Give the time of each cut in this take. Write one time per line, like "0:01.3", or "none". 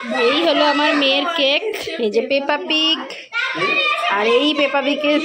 none